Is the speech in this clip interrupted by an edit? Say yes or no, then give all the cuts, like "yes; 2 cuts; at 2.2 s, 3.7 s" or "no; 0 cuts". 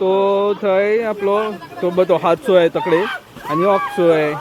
no; 0 cuts